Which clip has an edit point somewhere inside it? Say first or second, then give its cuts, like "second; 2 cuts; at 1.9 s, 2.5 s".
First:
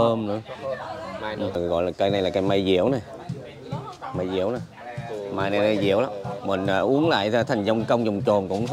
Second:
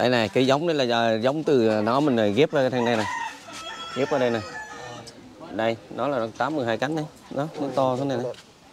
first; 1 cut; at 1.5 s